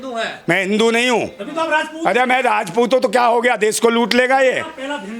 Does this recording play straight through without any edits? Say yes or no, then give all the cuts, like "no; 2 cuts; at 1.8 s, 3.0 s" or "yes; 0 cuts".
yes; 0 cuts